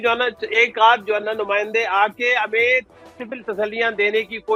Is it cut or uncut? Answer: uncut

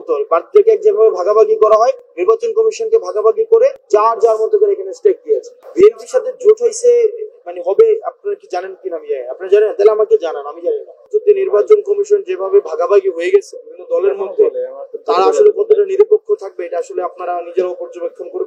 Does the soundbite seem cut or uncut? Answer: cut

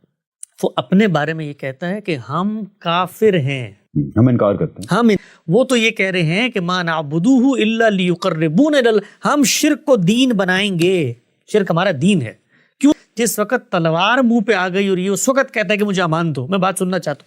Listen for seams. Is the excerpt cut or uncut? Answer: cut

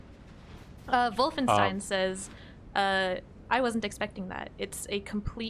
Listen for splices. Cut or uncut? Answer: uncut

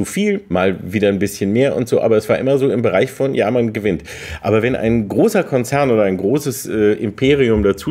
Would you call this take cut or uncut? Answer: uncut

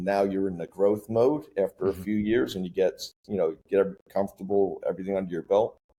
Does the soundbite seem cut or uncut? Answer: uncut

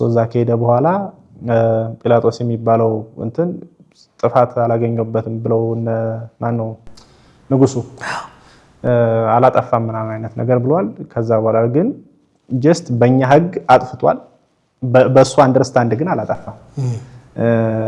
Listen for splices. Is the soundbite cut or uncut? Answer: uncut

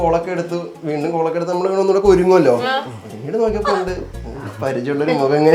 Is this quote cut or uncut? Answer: uncut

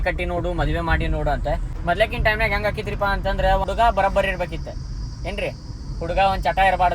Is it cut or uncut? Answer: cut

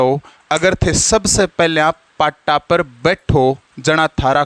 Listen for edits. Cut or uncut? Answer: uncut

